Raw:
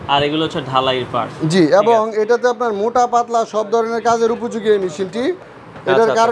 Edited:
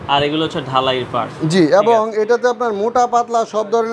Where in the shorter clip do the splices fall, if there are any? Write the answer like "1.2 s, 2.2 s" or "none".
none